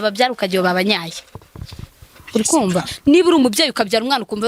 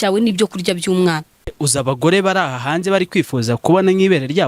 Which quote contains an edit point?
second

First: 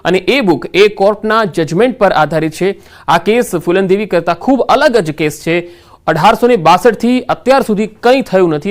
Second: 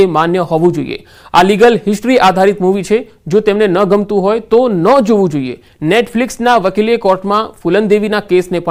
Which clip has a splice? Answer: first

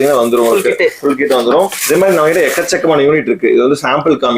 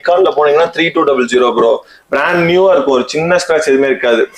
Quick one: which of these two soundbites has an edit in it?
first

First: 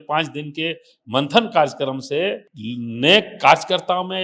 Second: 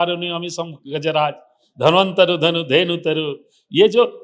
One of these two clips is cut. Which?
first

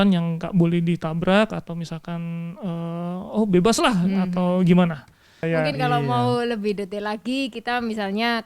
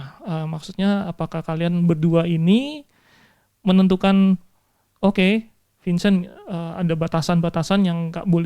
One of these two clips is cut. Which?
first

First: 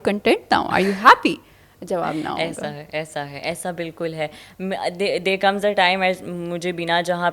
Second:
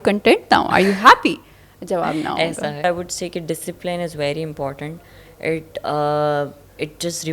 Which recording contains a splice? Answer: second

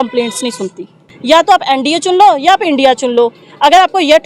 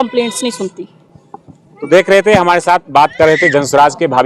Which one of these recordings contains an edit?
first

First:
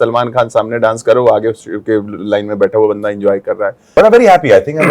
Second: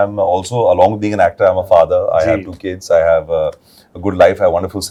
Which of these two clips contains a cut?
first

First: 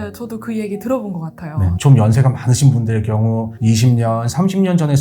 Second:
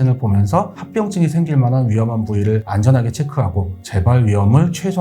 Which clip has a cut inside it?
first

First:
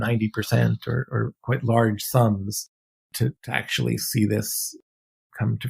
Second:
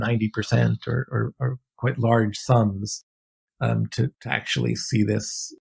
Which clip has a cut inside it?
first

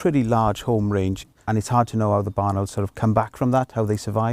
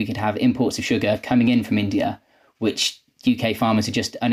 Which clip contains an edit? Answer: first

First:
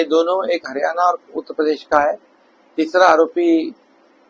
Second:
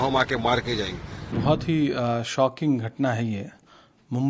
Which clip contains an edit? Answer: second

